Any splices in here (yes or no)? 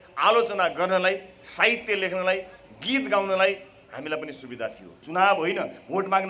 yes